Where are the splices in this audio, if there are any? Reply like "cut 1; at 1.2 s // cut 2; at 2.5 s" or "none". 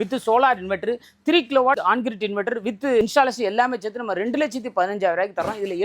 cut 1; at 1.8 s // cut 2; at 3.0 s